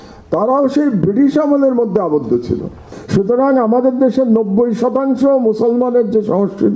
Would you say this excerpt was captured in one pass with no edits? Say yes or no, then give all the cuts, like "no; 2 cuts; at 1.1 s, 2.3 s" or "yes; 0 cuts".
no; 1 cut; at 2.9 s